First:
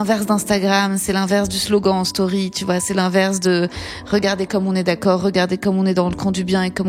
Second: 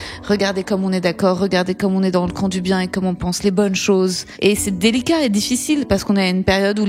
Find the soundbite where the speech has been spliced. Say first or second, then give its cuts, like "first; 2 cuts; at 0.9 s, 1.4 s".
second; 1 cut; at 4.2 s